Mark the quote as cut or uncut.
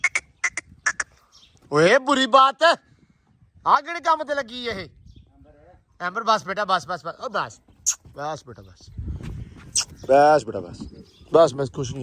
uncut